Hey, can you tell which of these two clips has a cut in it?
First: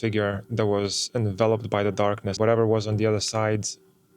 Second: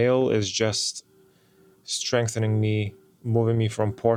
first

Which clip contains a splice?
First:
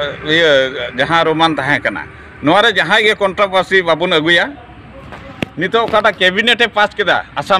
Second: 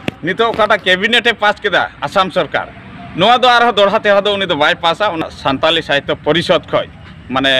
second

